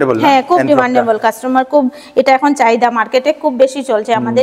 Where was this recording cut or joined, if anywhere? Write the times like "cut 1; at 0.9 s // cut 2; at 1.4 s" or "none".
none